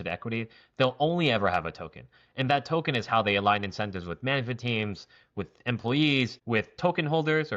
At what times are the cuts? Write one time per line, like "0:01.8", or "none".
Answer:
0:06.4